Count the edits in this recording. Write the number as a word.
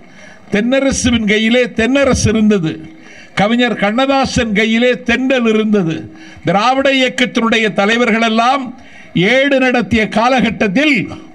zero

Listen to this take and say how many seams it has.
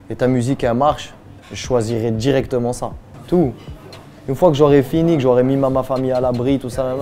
one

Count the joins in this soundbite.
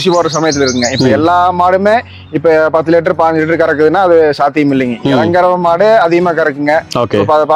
zero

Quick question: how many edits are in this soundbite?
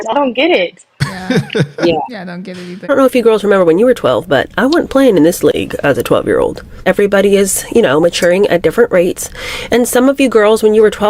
one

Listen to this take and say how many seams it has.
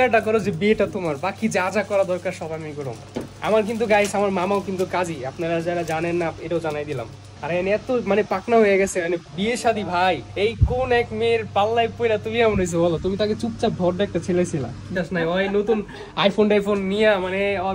three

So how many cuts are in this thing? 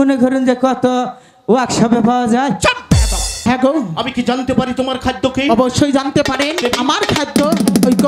two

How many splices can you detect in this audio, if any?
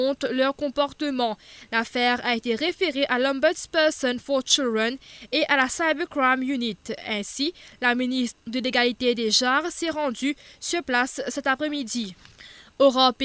one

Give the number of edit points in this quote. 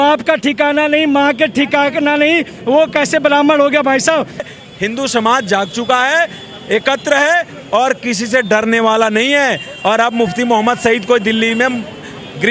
one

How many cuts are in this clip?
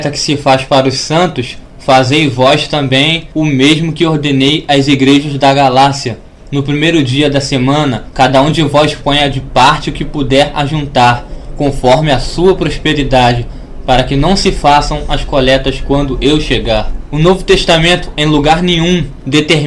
one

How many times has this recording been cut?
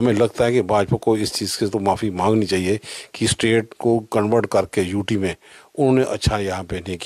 zero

